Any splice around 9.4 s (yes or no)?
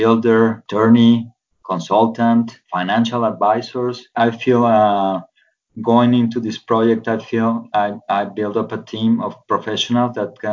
no